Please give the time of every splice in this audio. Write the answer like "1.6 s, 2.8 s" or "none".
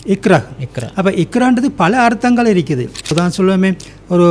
3.1 s